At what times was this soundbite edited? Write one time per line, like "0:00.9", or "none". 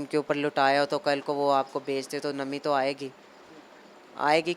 none